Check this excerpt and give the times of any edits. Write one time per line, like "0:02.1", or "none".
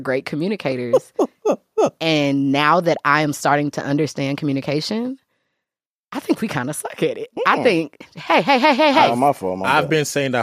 none